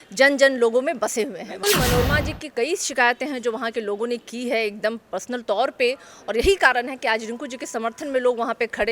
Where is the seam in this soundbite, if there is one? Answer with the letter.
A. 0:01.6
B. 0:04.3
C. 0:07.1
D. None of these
A